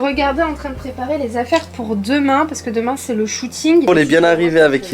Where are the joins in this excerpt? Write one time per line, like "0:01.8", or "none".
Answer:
0:03.9